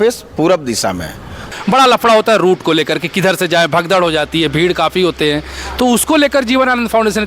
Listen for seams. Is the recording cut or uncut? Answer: cut